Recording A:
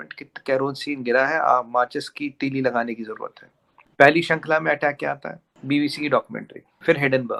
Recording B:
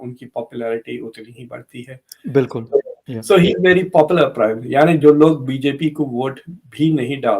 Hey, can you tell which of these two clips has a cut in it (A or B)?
B